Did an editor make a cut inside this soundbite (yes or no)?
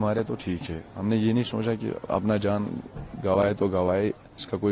no